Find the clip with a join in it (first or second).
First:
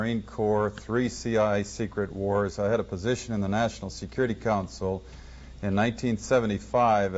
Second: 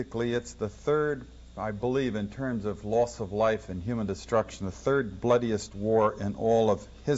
second